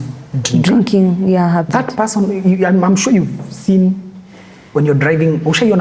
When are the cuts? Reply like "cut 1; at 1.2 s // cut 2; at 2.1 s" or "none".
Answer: none